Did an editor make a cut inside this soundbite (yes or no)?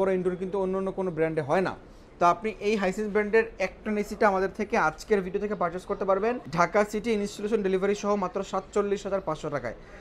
no